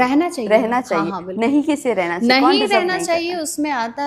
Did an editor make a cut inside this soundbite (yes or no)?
no